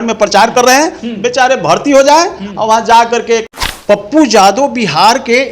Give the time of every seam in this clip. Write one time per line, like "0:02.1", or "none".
0:03.6